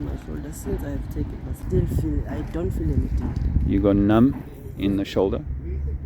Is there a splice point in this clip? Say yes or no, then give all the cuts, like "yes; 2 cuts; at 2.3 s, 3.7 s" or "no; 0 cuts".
yes; 1 cut; at 1.5 s